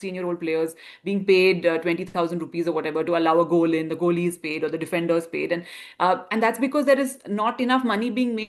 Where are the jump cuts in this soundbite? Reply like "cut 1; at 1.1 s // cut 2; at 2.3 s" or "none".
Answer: none